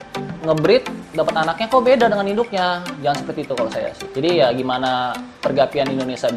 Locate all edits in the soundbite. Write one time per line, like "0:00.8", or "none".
0:04.0
0:05.2